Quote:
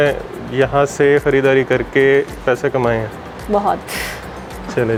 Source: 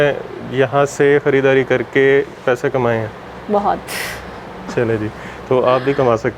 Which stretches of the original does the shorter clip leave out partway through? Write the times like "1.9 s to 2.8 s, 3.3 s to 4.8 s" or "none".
none

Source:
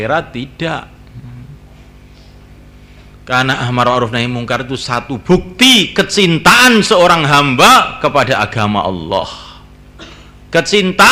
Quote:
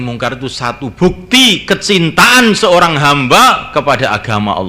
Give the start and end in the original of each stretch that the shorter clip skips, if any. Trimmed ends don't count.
none

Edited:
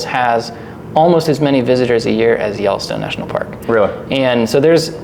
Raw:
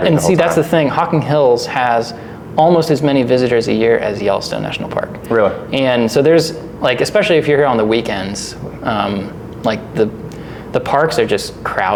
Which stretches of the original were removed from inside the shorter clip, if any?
none

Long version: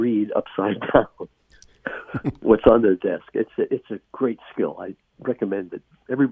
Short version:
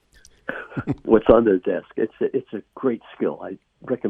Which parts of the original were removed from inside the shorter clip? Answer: none

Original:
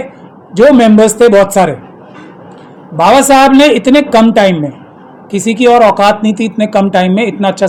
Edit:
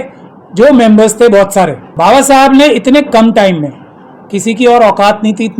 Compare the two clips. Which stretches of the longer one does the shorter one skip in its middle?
1.8 s to 2.8 s

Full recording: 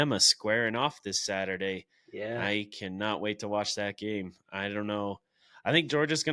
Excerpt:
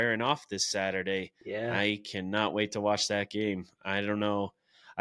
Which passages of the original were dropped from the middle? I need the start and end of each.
1.9 s to 2.0 s

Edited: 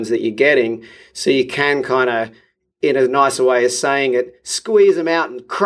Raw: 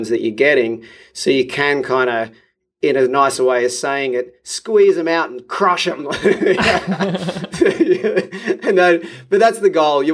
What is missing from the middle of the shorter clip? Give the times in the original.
none

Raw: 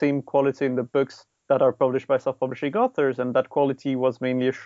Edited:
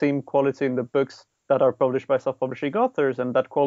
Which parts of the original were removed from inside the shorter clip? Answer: none

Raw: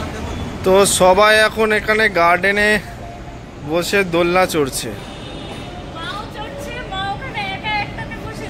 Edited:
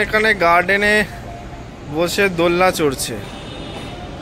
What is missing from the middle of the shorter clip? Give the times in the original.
none

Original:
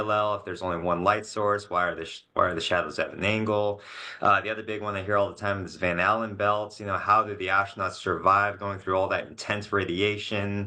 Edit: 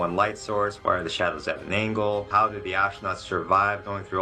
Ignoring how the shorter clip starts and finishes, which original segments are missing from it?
1.6 s to 2.3 s, 3.8 s to 7.0 s

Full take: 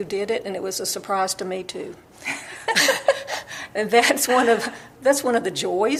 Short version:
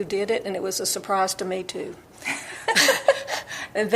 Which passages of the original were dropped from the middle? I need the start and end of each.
none

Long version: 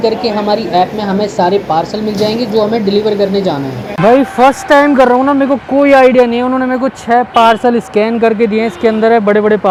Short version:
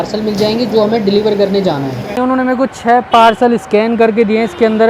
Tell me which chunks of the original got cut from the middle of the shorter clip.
3.9 s to 6.4 s

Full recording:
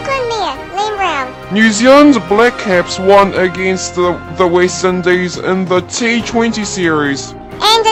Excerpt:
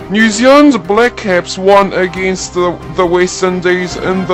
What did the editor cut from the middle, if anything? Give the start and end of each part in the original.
none

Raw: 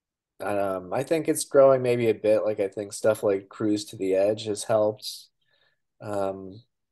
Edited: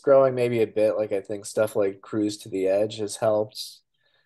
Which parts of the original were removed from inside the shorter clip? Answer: none

